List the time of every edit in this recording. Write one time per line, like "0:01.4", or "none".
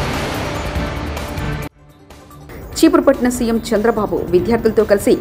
none